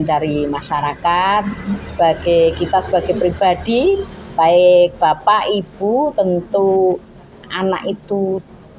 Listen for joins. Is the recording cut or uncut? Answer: uncut